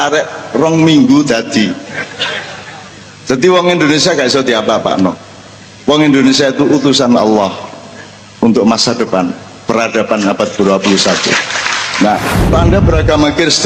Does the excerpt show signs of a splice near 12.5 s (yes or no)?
yes